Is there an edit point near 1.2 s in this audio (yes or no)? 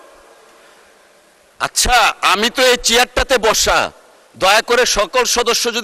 no